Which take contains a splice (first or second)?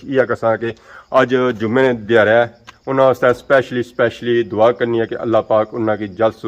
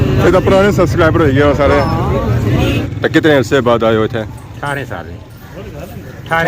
second